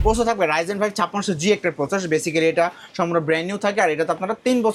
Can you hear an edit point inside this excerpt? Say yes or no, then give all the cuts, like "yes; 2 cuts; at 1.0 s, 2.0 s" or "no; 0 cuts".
no; 0 cuts